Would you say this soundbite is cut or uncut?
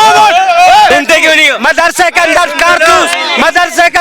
cut